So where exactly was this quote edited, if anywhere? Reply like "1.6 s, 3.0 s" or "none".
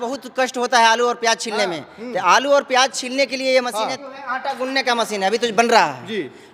3.9 s